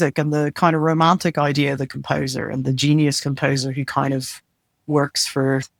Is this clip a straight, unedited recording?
yes; 0 cuts

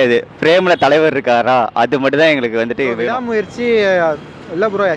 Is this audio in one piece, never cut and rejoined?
no; 1 cut; at 3.2 s

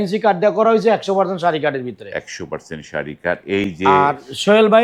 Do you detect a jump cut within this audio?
no; 0 cuts

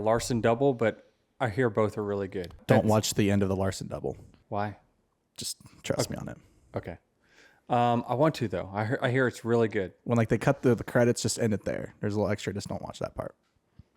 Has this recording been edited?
yes; 2 cuts; at 2.6 s, 4.3 s

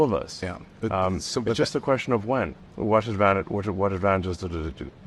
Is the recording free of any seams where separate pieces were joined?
no; 1 cut; at 2.6 s

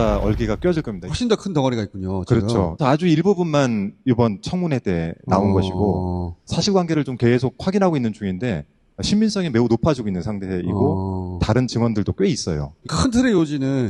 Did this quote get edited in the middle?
no; 0 cuts

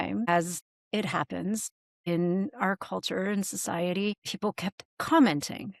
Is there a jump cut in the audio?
no; 0 cuts

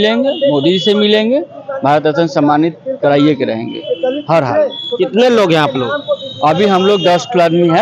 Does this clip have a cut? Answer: no; 0 cuts

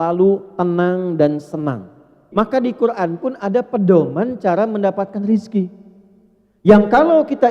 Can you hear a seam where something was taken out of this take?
yes; 1 cut; at 2.2 s

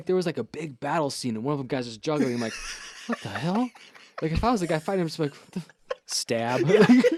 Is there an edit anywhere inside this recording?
no; 0 cuts

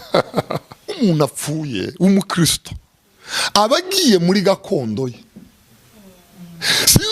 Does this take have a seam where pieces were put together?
yes; 1 cut; at 0.9 s

